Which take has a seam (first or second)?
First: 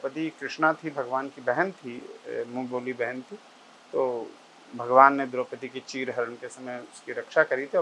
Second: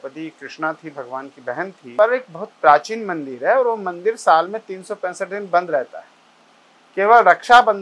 second